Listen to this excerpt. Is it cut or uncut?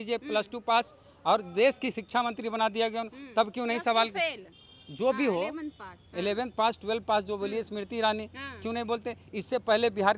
uncut